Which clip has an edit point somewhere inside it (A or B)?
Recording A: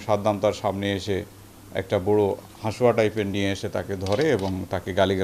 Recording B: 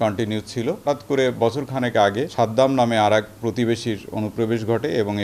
B